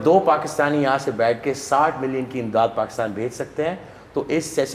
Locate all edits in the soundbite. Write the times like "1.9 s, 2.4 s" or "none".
none